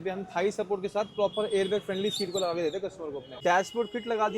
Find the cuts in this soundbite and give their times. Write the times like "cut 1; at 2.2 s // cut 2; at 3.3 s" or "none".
cut 1; at 3.3 s